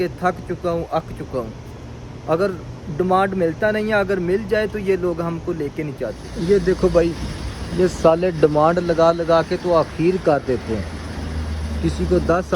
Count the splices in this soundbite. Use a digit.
1